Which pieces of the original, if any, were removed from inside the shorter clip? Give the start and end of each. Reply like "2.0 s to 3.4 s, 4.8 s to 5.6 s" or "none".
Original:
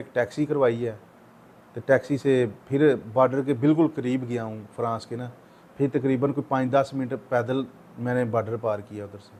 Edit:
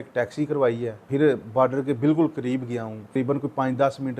1.0 s to 2.6 s, 4.8 s to 6.1 s